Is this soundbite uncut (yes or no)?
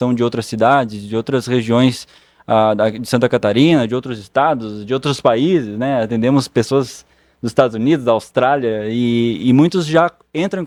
yes